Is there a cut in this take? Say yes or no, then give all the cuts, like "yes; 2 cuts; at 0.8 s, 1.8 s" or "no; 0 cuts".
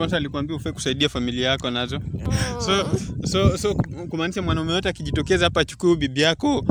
yes; 1 cut; at 2.3 s